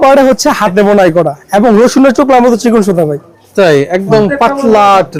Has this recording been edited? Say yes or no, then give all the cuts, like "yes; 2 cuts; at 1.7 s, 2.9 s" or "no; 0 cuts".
no; 0 cuts